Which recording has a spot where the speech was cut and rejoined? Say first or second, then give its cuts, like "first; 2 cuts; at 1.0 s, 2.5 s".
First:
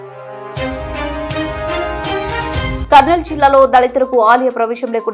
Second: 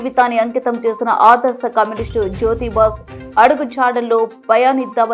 first; 2 cuts; at 1.0 s, 2.8 s